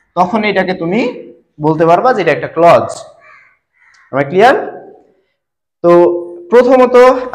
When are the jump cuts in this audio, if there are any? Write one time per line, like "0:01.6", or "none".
none

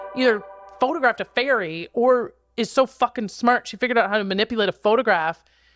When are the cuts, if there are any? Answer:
none

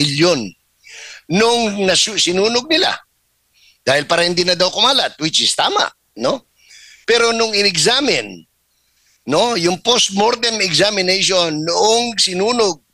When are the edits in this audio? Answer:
none

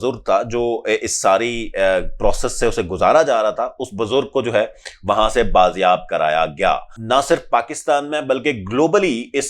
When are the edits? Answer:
0:07.0

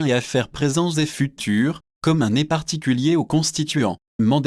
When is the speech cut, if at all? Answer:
none

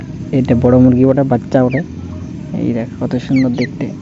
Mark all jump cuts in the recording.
none

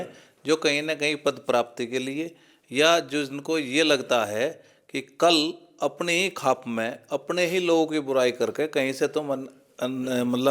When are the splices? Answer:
none

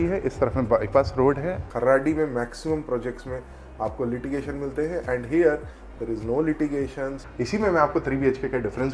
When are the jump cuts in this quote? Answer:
0:01.7
0:07.2

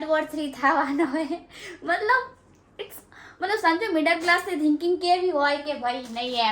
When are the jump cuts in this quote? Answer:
none

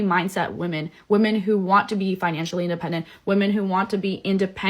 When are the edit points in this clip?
0:01.4

